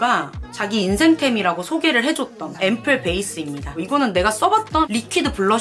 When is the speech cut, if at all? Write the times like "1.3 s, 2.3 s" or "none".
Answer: 3.8 s